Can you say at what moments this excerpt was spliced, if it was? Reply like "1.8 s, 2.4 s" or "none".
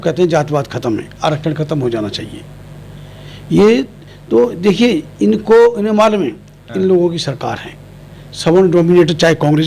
none